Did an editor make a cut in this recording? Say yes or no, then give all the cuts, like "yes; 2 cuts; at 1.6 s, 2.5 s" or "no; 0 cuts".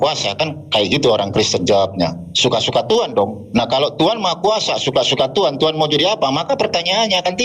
no; 0 cuts